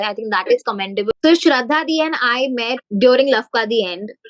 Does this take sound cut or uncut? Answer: cut